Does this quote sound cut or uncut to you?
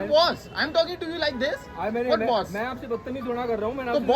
uncut